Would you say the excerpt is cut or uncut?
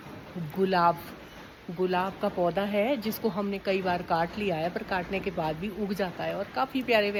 uncut